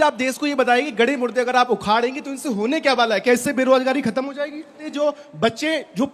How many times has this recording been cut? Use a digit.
1